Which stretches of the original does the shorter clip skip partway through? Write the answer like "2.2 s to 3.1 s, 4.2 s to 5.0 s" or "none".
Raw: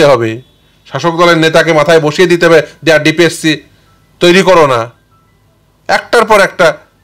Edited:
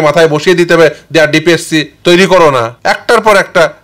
3.6 s to 4.1 s, 4.9 s to 5.8 s